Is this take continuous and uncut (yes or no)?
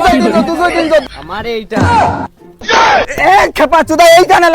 no